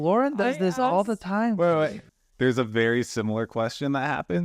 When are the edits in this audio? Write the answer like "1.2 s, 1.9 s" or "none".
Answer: 2.0 s